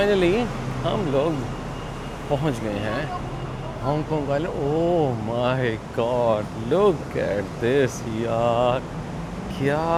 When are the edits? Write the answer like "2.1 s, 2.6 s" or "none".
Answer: none